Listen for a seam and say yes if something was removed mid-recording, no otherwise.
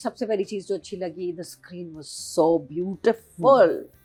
no